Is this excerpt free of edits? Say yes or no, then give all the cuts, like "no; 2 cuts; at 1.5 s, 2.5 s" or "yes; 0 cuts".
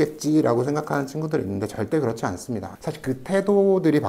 no; 1 cut; at 2.7 s